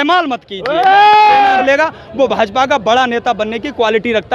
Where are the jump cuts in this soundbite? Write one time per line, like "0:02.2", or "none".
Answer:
0:01.6